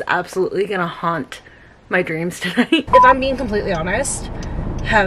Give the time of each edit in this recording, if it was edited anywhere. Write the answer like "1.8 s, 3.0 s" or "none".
2.9 s